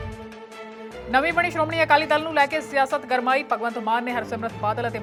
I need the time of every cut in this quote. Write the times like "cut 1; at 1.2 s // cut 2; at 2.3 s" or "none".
none

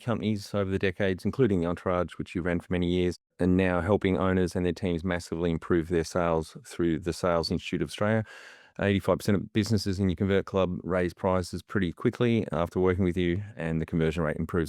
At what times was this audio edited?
cut 1; at 3.3 s

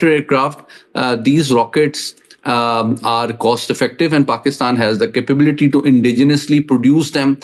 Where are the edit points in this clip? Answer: none

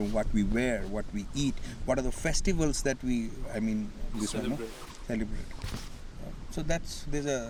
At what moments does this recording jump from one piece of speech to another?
none

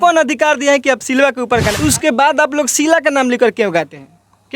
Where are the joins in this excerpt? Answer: cut 1; at 1.7 s

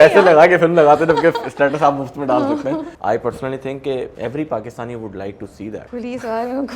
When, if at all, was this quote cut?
cut 1; at 2.9 s // cut 2; at 4.1 s // cut 3; at 5.9 s

